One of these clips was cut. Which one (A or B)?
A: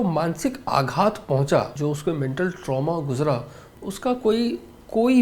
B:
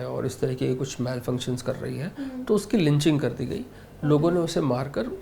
A